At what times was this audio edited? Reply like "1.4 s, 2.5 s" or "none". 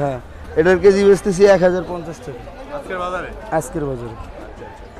none

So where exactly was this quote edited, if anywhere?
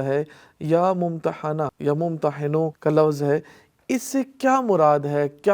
1.7 s, 2.8 s

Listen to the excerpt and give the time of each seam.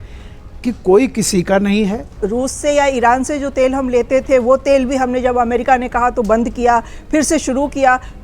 2.1 s

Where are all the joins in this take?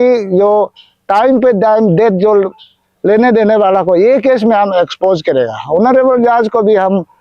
none

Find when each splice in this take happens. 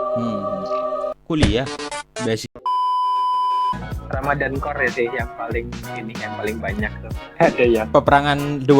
2.4 s, 3.9 s

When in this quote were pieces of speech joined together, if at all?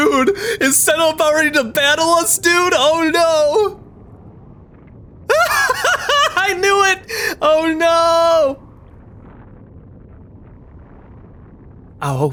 none

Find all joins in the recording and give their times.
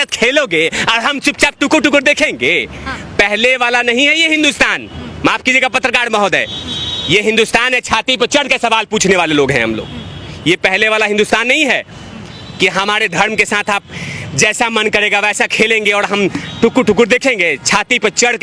none

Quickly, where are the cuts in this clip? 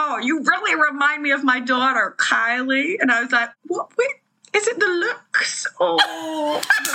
3.5 s

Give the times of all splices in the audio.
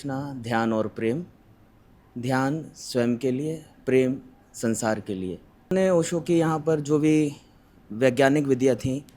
5.7 s

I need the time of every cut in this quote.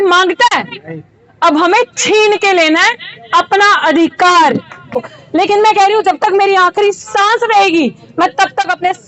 5.1 s

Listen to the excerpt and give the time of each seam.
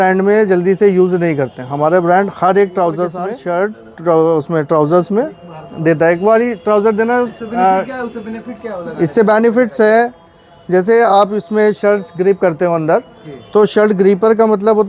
3.3 s

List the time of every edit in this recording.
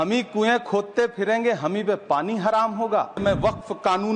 3.2 s

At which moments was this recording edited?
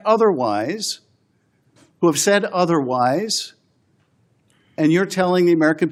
none

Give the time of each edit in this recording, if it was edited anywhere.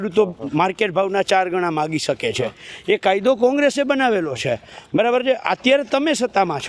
none

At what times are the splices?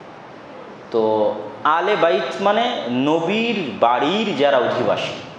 none

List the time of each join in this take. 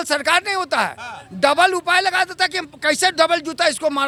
none

